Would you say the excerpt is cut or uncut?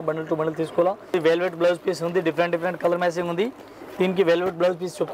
cut